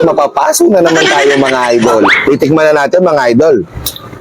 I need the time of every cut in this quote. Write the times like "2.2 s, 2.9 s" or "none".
2.3 s

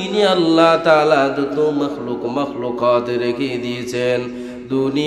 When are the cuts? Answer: none

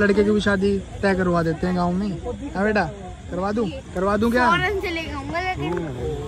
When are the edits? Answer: none

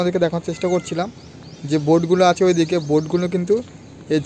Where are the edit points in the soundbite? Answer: none

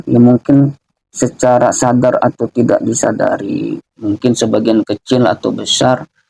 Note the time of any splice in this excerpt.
none

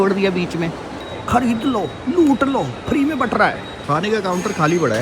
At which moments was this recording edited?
0.9 s, 3.7 s

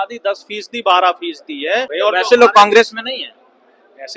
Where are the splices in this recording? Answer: 1.9 s

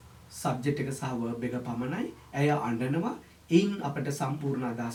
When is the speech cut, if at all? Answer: none

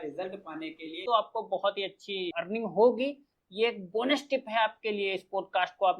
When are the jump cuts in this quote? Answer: 1.0 s, 2.3 s

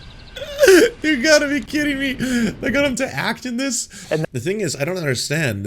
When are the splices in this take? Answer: 3.9 s

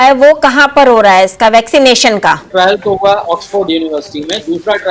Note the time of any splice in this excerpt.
2.5 s

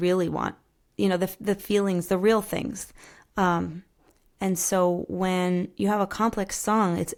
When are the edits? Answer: none

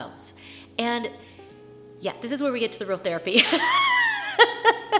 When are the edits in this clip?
none

